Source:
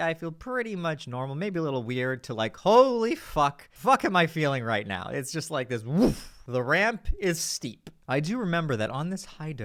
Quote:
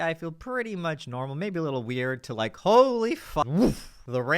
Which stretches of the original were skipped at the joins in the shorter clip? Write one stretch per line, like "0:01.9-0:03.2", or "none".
0:03.4-0:05.8